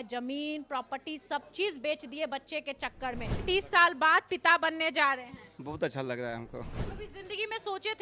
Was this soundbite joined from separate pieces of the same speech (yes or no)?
yes